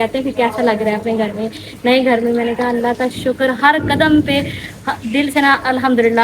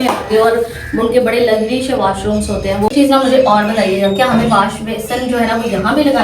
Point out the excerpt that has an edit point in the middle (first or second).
second